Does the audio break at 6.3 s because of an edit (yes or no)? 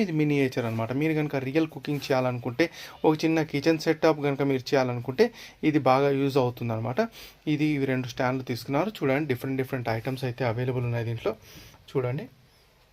no